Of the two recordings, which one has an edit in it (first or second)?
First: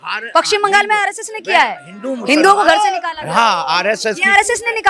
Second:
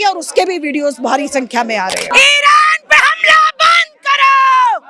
second